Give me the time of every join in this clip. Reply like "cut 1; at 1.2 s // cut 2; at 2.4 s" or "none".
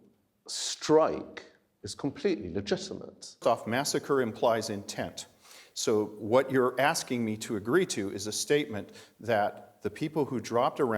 cut 1; at 3.4 s